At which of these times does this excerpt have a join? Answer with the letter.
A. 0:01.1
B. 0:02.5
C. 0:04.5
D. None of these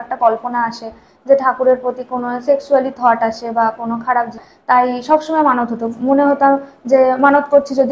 C